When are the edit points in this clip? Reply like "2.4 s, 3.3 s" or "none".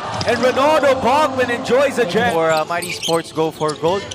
2.3 s